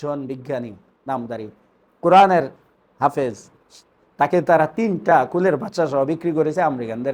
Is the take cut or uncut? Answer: uncut